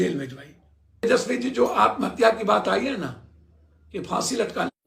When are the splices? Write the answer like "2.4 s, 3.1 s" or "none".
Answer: 1.0 s